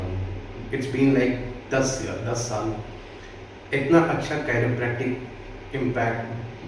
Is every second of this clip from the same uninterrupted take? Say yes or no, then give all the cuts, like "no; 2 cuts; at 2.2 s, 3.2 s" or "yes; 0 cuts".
yes; 0 cuts